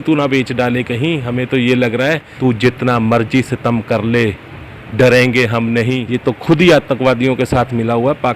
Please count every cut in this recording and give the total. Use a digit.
2